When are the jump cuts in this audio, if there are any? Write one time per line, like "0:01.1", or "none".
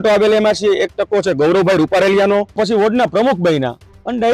0:02.5